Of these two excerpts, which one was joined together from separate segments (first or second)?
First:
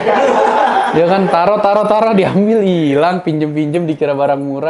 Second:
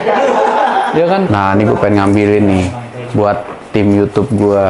second